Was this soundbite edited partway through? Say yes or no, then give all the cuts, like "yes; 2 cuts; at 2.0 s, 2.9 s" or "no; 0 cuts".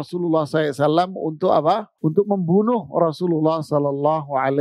yes; 1 cut; at 1.9 s